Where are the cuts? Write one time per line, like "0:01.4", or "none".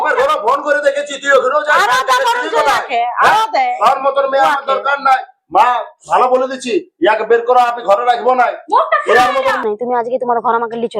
0:09.6